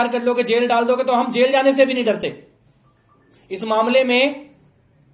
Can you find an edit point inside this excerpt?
no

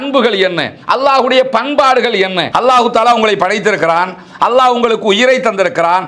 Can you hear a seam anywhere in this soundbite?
yes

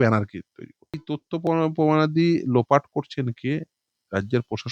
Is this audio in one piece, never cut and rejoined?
no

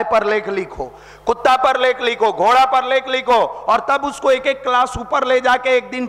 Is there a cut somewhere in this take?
no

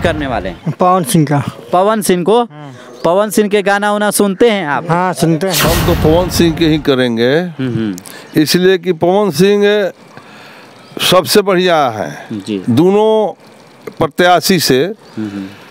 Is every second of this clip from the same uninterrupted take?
no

